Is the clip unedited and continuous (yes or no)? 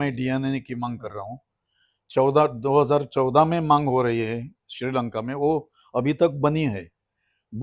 yes